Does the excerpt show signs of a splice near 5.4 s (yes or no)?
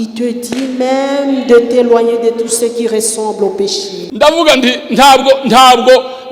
no